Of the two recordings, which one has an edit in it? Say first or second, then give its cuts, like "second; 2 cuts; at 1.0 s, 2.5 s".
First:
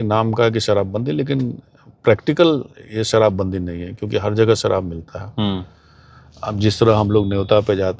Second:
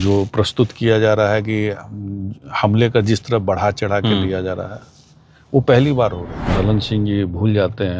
second; 1 cut; at 6.5 s